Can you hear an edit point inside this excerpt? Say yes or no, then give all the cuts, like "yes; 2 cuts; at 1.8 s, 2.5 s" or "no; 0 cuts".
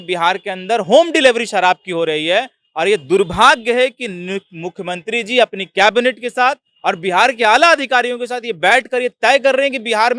no; 0 cuts